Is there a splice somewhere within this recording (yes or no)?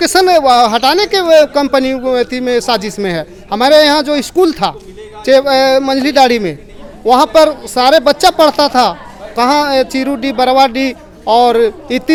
no